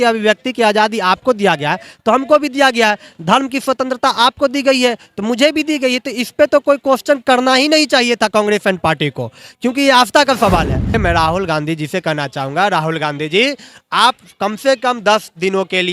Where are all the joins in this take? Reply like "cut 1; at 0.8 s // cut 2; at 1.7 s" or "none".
cut 1; at 11.0 s